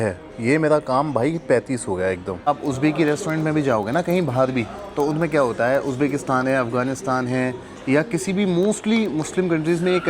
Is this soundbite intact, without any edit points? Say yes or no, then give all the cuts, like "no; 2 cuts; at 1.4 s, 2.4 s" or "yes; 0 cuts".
no; 1 cut; at 2.5 s